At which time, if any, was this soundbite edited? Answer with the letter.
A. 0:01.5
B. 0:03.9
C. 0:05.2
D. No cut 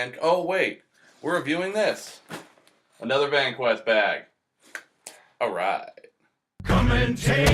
C